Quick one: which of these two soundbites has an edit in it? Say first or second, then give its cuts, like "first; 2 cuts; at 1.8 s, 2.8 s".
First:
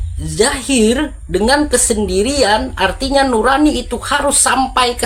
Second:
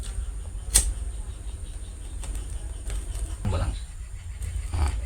second; 1 cut; at 3.5 s